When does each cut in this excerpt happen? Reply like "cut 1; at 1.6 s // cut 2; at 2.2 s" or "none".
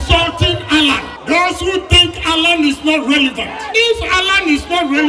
cut 1; at 1.1 s // cut 2; at 3.6 s